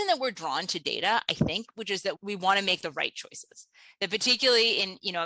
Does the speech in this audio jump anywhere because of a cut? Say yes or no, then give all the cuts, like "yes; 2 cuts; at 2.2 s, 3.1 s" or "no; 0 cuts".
yes; 1 cut; at 2.2 s